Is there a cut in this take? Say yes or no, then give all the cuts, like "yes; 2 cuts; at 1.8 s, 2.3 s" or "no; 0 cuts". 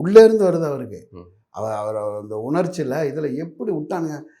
no; 0 cuts